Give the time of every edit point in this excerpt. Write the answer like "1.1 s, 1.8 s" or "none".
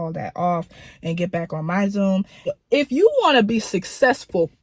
2.4 s